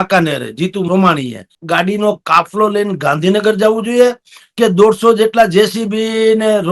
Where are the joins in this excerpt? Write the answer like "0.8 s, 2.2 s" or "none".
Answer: 1.6 s